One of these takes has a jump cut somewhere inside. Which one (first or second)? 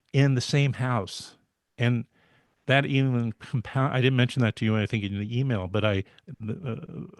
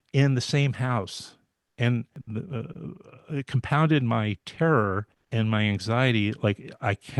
second